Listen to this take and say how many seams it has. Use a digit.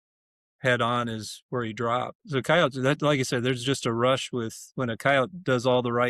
1